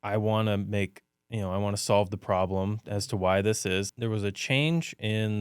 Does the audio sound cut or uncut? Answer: cut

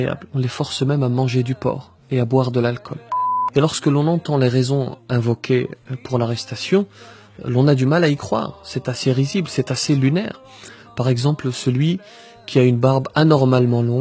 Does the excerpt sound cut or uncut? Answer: cut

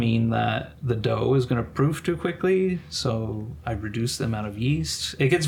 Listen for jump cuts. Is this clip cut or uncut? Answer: uncut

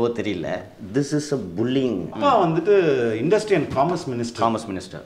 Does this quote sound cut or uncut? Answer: cut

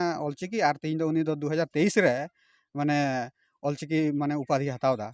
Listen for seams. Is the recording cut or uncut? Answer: uncut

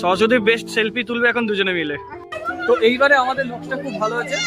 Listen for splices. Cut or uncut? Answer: cut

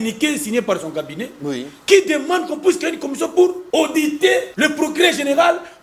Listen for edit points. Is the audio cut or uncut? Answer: cut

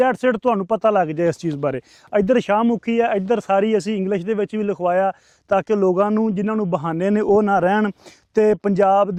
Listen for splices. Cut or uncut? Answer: uncut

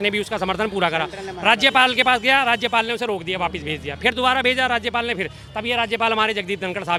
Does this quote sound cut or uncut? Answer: uncut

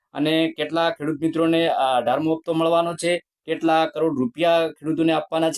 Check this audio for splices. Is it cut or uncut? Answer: uncut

